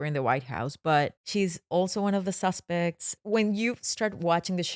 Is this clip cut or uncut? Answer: cut